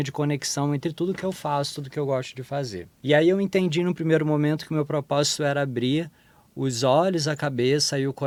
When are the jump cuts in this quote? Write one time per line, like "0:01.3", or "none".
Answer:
none